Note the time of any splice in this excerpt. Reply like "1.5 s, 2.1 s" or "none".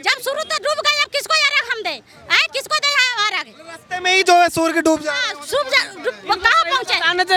none